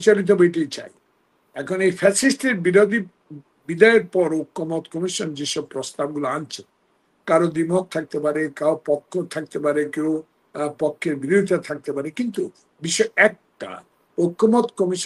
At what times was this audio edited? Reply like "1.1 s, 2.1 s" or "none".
none